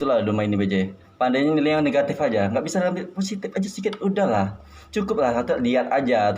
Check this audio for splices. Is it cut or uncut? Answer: uncut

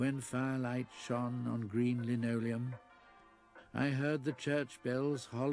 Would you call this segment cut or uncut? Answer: uncut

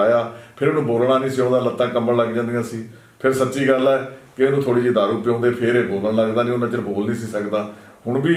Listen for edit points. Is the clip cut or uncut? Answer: uncut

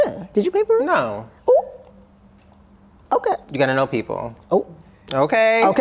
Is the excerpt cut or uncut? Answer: uncut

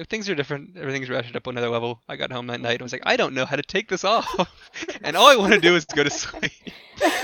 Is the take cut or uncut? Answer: uncut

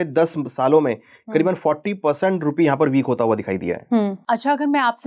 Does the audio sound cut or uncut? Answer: uncut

